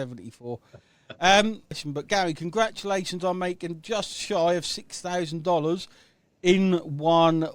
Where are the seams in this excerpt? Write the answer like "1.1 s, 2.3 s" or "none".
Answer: 1.8 s